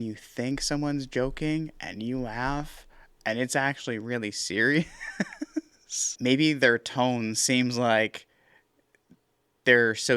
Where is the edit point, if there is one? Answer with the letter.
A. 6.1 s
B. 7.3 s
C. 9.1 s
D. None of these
A